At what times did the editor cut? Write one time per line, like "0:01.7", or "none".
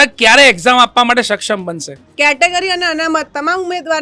0:02.0